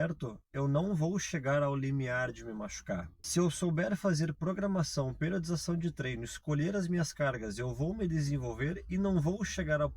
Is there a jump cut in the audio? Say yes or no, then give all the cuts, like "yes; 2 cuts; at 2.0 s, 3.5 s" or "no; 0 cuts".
yes; 1 cut; at 3.2 s